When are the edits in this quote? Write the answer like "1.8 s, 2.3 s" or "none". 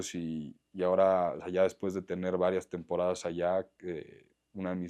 none